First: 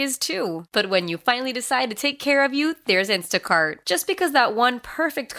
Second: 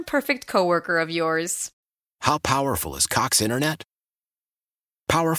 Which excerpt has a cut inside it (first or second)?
second